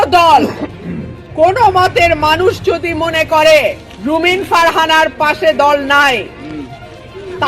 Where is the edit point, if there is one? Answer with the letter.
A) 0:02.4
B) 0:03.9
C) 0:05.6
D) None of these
B